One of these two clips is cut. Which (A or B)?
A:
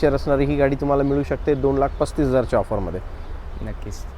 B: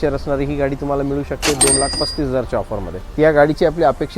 B